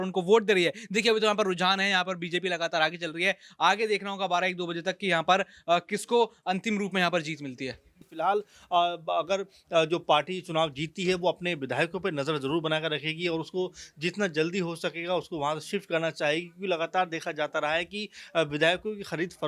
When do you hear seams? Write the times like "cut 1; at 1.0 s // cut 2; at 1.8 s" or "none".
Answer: cut 1; at 8.0 s